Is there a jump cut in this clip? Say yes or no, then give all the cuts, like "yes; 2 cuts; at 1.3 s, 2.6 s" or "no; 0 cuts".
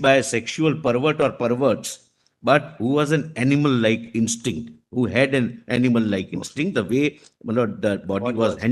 no; 0 cuts